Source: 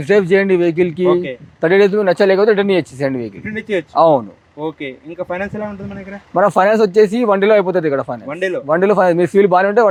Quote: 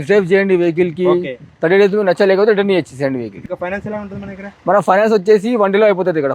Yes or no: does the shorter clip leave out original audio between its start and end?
yes